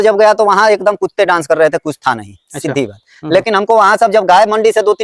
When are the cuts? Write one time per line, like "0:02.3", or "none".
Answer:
none